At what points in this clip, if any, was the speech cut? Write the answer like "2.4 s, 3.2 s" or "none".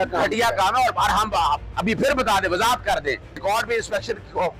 3.4 s